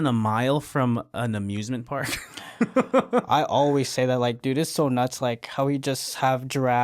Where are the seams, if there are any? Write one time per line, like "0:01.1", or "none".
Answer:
none

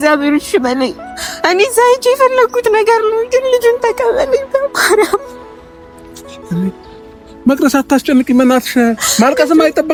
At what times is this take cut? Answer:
none

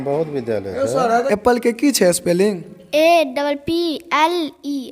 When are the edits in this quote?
0:01.2

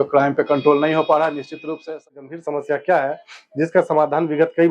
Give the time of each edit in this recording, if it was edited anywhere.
0:02.2

